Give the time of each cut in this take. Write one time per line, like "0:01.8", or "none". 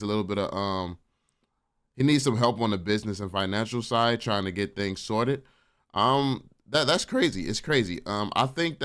none